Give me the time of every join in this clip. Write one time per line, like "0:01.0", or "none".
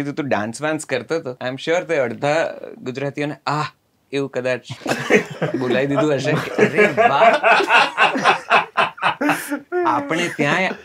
0:01.3
0:04.8